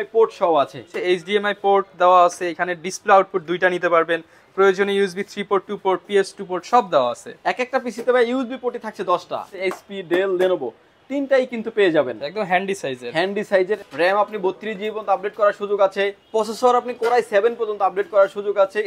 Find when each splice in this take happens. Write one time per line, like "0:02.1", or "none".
0:00.9
0:09.5
0:13.8
0:16.2